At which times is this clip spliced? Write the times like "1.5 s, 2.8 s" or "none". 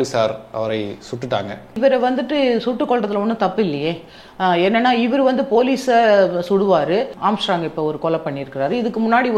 1.8 s, 7.1 s